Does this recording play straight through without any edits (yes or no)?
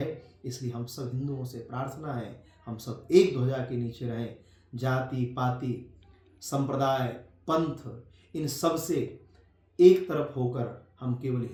yes